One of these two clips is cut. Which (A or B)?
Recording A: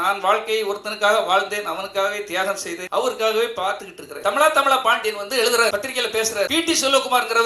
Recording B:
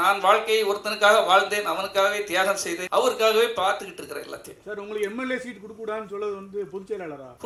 A